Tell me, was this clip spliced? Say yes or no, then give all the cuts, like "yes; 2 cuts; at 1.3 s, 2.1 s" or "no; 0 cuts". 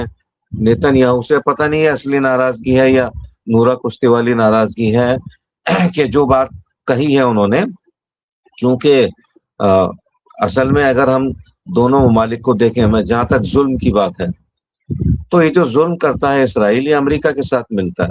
no; 0 cuts